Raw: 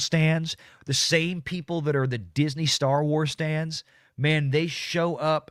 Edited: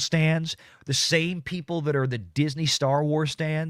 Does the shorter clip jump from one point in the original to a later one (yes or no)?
no